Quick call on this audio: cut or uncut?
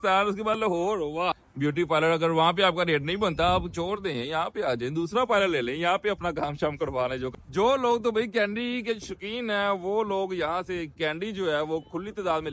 cut